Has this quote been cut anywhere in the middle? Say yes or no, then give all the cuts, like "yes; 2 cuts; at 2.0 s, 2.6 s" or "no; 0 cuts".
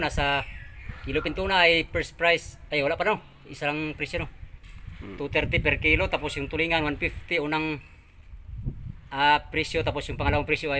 no; 0 cuts